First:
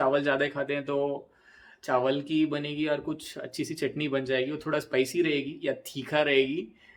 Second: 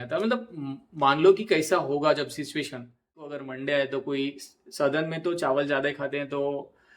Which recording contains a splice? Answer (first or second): second